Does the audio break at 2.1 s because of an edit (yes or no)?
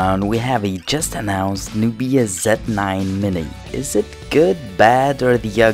yes